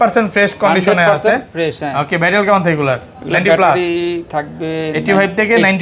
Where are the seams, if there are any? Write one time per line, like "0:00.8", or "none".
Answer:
none